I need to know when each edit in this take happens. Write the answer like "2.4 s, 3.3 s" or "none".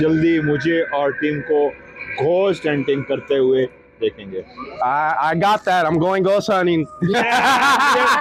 none